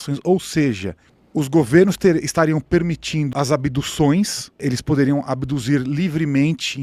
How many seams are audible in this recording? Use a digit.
2